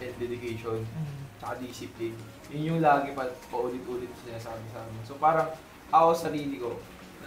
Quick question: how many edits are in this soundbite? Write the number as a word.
zero